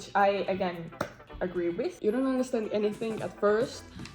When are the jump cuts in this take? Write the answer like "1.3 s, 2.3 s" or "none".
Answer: 2.0 s